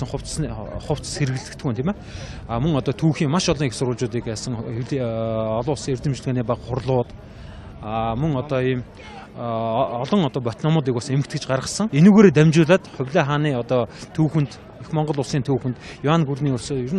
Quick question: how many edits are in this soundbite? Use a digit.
1